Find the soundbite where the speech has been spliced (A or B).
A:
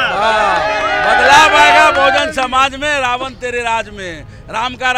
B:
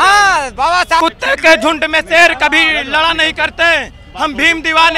B